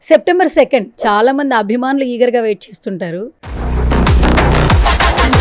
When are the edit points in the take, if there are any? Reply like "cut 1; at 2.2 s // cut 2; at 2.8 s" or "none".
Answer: cut 1; at 0.9 s